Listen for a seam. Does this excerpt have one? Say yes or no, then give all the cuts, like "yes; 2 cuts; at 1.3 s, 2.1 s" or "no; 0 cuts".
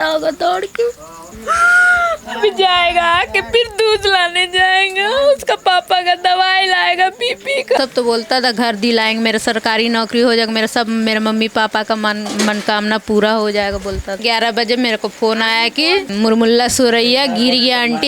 yes; 3 cuts; at 7.8 s, 14.2 s, 16.1 s